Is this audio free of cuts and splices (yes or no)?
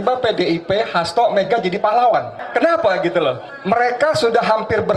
no